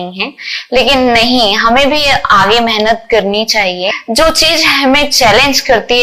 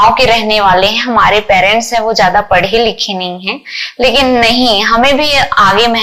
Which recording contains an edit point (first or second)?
first